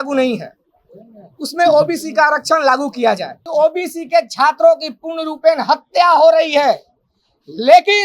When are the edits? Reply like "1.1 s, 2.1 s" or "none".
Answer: 3.5 s